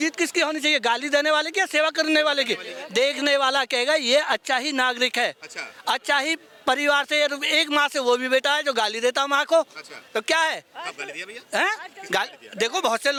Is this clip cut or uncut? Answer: uncut